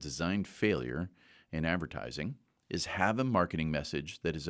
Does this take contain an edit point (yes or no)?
no